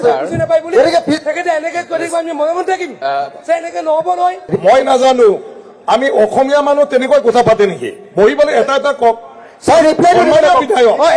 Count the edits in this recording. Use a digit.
1